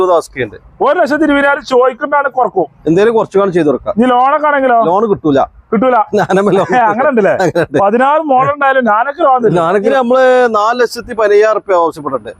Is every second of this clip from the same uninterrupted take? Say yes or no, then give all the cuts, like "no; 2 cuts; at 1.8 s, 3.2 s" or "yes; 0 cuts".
no; 1 cut; at 9.9 s